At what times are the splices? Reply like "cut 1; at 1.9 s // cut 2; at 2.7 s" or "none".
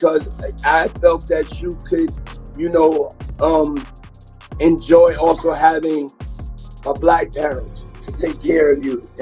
none